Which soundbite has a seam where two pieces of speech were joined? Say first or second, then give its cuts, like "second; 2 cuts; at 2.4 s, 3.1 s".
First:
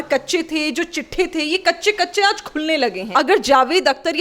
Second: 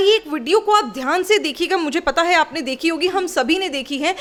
first; 1 cut; at 3.0 s